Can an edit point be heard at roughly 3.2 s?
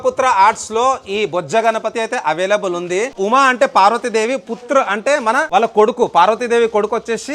yes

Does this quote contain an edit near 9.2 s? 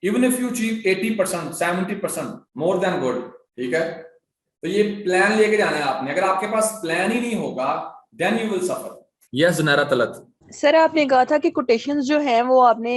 yes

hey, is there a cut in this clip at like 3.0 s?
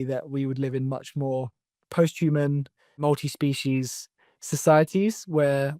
yes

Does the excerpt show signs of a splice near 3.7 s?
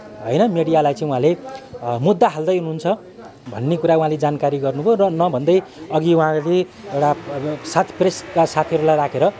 no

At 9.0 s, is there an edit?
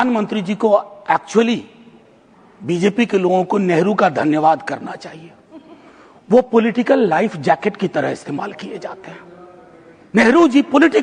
no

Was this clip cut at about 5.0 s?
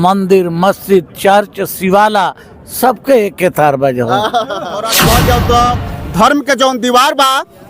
yes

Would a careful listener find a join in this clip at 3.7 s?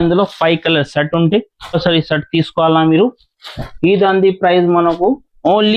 no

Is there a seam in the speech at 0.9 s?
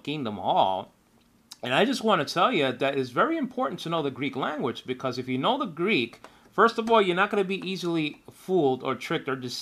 yes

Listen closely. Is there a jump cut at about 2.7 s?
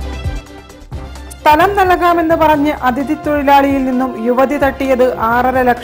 no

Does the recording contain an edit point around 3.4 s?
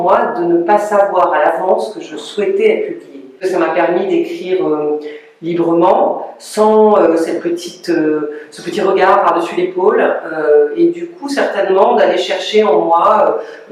yes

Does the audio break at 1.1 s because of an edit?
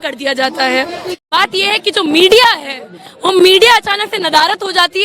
yes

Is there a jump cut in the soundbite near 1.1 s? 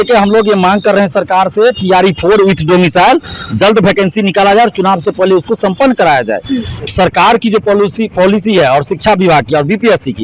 no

